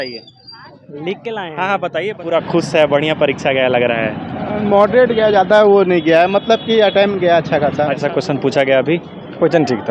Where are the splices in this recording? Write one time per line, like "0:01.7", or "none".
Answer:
0:02.2
0:08.0